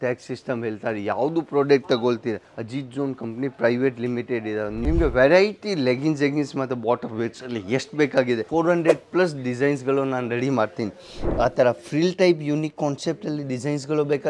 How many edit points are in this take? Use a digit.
3